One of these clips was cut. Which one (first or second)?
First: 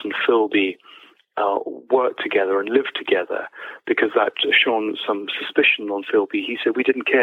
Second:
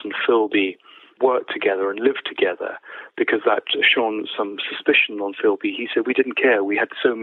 second